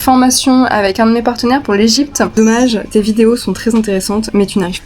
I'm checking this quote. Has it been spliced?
yes; 1 cut; at 2.3 s

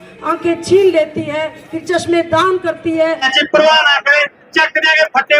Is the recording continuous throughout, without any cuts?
no; 1 cut; at 3.3 s

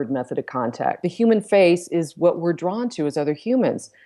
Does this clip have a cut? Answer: yes; 1 cut; at 1.0 s

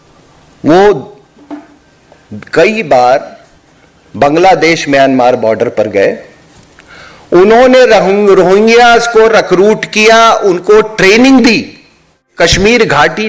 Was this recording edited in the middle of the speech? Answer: yes; 1 cut; at 12.2 s

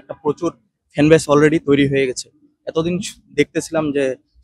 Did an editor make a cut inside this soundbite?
no; 0 cuts

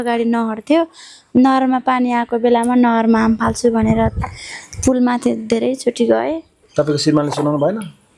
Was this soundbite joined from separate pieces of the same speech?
no; 0 cuts

